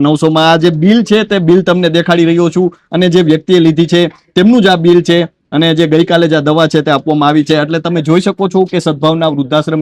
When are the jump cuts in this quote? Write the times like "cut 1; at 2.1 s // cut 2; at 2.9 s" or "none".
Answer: none